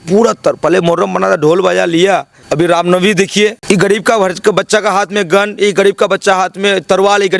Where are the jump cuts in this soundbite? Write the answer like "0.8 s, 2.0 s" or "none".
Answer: 2.4 s, 3.6 s